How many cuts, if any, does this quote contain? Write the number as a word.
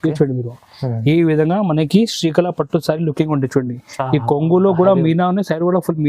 zero